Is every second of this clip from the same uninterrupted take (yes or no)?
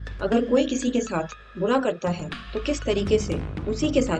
yes